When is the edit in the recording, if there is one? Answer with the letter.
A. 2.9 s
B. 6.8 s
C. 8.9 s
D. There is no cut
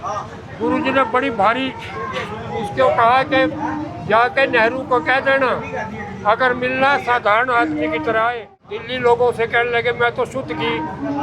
C